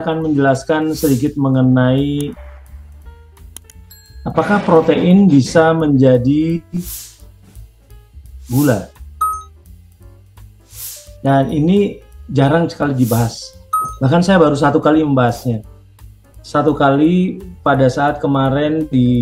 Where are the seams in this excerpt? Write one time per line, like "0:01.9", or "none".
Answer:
none